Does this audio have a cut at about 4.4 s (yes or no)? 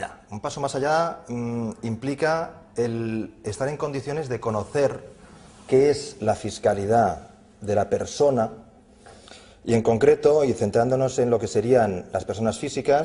yes